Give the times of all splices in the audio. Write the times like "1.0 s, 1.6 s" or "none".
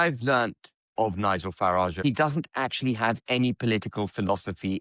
2.0 s